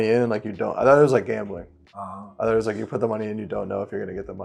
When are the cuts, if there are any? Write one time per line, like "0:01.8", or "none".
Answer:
none